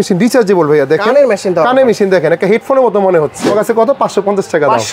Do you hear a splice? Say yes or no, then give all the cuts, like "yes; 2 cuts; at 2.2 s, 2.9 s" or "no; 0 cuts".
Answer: yes; 1 cut; at 3.5 s